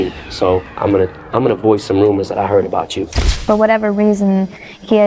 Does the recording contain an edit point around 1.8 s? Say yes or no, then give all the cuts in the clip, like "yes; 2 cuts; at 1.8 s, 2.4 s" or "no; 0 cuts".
no; 1 cut; at 3.3 s